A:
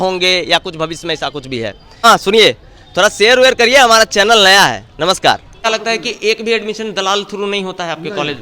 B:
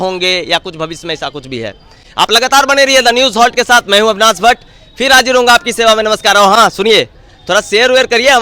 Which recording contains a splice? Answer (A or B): A